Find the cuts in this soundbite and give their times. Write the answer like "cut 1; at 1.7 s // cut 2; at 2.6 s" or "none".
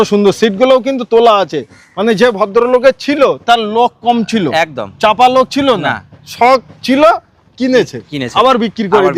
none